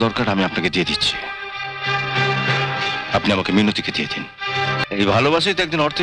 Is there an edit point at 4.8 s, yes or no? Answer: yes